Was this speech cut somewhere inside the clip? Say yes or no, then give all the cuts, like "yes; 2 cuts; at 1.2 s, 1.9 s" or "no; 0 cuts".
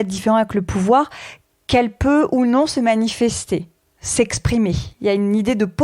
no; 0 cuts